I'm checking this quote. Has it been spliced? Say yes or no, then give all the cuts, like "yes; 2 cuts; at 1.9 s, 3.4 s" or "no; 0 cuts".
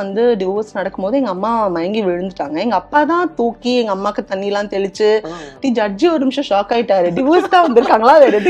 yes; 1 cut; at 5.5 s